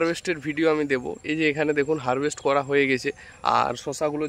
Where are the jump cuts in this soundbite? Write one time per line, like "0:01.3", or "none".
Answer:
none